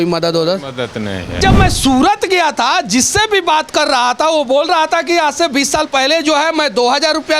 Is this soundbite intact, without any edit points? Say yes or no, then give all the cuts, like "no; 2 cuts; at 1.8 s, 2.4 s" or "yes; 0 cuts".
no; 1 cut; at 1.4 s